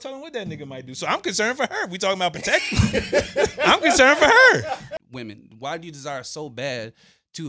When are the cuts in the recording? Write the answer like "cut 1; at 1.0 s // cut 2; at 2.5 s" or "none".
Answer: cut 1; at 4.9 s